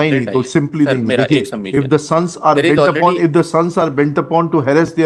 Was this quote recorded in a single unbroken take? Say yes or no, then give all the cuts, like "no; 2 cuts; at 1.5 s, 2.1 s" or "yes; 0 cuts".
yes; 0 cuts